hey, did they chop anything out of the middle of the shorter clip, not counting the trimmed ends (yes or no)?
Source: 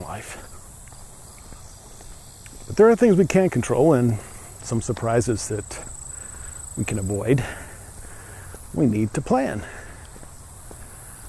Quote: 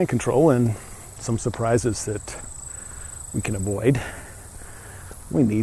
no